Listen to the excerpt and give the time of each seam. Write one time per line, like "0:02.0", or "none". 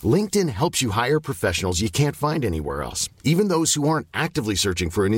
none

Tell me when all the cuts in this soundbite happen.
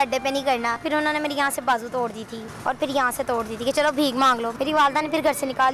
0:00.8
0:02.4
0:04.5

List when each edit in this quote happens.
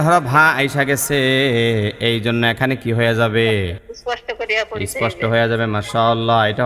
0:03.9

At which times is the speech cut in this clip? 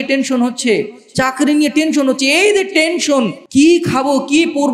0:03.4

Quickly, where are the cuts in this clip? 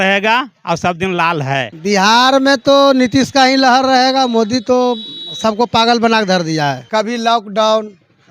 0:01.7
0:06.8

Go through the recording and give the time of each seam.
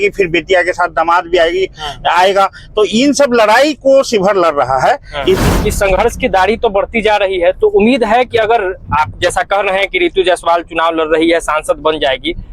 0:05.4

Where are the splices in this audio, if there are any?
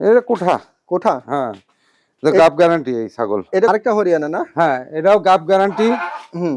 0:03.7

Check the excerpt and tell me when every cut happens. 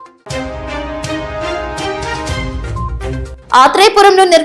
0:01.6
0:02.9

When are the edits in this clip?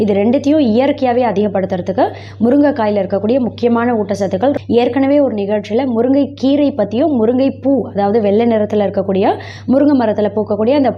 0:04.6

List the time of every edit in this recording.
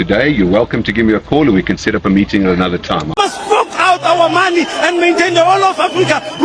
0:03.2

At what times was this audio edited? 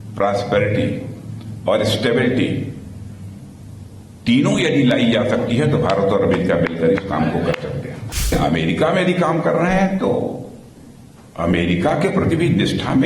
0:08.3

